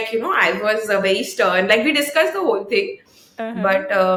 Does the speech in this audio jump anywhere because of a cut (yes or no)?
no